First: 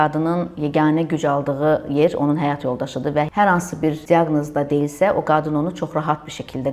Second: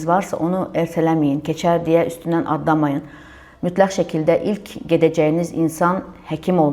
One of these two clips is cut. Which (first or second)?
first